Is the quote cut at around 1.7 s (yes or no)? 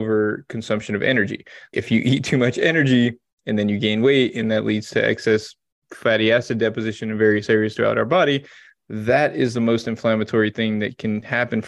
yes